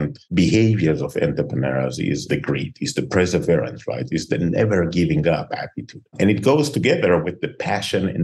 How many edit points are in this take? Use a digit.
1